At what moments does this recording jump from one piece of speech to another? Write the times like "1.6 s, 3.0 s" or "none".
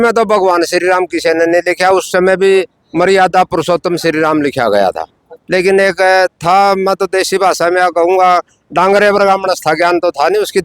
5.3 s